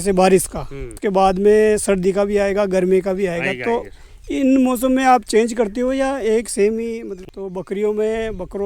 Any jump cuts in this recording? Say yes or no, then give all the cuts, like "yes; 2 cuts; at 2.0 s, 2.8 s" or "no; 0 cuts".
yes; 1 cut; at 7.1 s